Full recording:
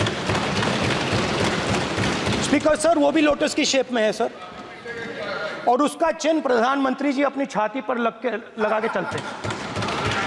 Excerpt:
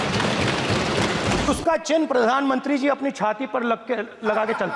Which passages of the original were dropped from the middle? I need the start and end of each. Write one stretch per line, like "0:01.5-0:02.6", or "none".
0:01.9-0:05.8